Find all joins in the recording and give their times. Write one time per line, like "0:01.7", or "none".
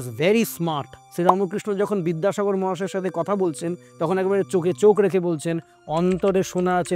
0:01.0